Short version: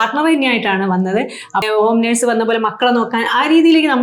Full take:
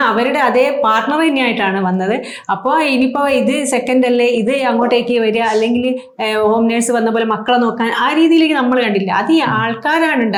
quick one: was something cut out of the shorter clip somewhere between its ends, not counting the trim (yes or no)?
yes